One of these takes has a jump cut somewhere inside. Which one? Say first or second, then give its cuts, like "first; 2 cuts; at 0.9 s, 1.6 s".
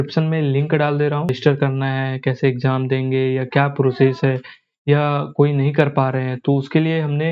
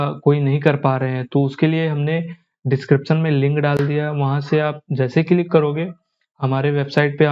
first; 1 cut; at 1.4 s